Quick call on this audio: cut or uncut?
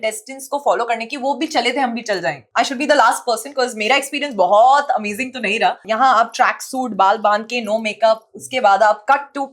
cut